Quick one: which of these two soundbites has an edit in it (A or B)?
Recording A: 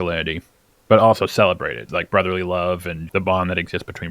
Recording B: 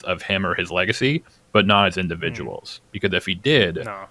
A